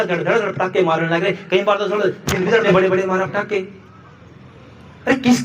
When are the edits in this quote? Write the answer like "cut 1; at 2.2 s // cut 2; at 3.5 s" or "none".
cut 1; at 2.6 s